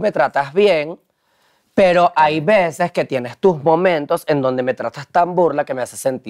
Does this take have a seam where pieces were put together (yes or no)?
no